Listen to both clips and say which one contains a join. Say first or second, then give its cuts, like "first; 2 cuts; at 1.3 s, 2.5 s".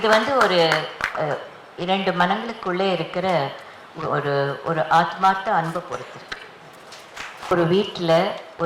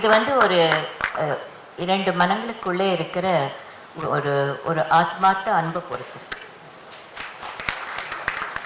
first; 1 cut; at 7.5 s